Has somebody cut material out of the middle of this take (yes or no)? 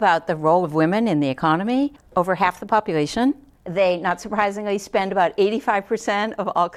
no